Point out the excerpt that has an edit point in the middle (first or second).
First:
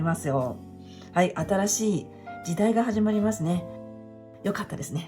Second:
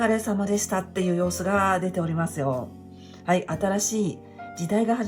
first